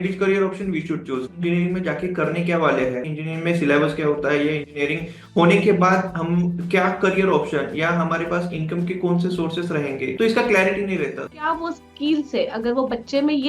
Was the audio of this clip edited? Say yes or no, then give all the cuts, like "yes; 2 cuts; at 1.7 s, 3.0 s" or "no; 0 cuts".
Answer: yes; 2 cuts; at 1.3 s, 11.3 s